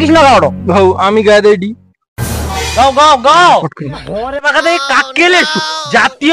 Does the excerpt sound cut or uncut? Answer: cut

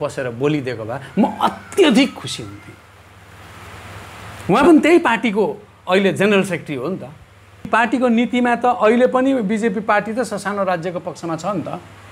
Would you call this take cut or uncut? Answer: cut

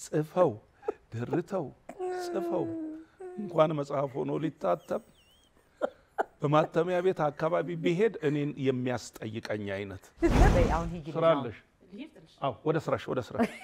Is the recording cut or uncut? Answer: cut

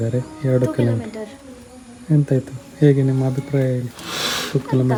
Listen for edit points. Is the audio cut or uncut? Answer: uncut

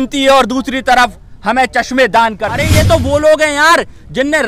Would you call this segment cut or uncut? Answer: cut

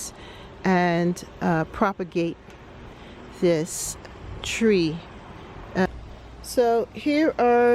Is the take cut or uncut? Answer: cut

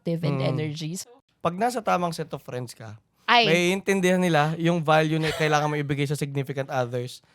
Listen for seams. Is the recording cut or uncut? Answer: cut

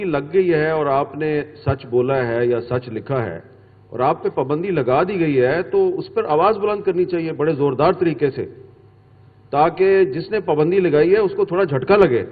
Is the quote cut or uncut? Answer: uncut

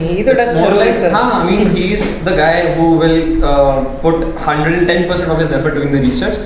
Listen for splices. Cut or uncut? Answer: uncut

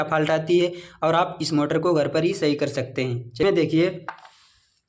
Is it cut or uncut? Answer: cut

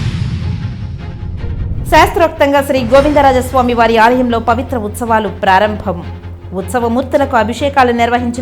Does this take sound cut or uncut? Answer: cut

